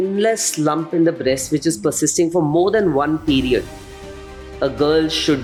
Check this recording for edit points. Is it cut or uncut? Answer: uncut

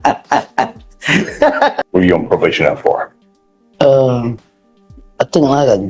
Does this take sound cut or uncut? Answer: cut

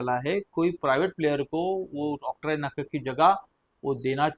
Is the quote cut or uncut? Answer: uncut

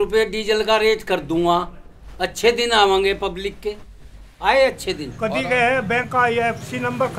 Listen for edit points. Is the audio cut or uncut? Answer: cut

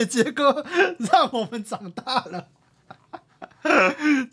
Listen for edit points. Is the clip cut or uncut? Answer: uncut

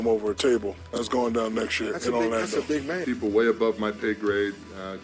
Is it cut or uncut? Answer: cut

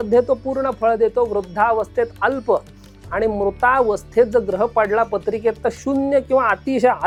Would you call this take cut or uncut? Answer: uncut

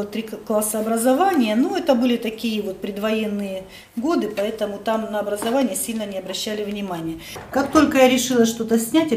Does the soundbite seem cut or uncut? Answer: cut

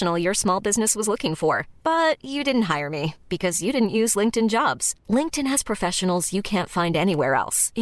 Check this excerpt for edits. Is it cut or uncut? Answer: uncut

